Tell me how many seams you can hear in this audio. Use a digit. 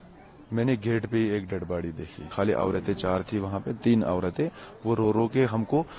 1